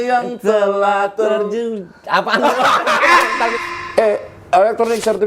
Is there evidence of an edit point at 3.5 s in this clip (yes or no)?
yes